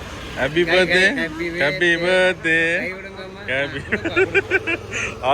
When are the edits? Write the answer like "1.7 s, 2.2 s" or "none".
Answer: none